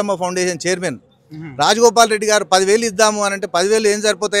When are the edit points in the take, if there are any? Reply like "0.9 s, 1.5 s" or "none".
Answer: none